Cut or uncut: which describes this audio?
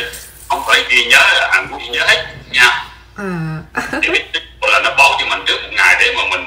cut